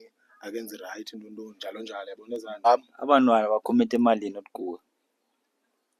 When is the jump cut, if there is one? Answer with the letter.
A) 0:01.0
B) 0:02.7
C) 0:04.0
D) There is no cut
B